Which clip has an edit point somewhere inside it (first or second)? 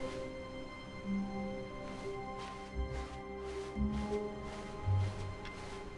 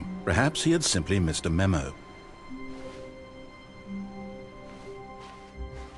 second